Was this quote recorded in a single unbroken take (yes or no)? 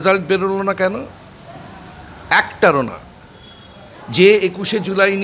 yes